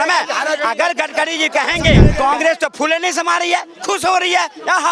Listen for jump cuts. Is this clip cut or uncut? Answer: cut